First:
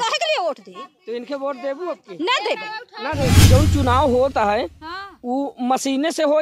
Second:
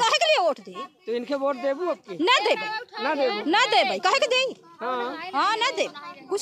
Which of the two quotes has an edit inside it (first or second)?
first